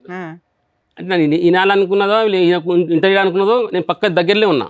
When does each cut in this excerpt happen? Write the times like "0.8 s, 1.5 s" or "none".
none